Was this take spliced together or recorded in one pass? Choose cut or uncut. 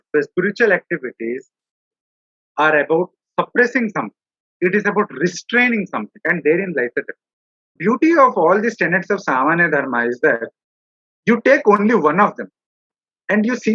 cut